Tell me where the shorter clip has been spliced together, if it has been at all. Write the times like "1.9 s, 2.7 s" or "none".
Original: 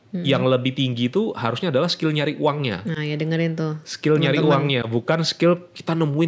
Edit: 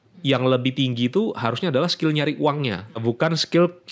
2.9 s